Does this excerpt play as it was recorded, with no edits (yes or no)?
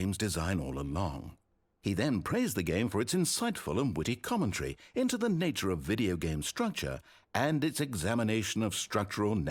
yes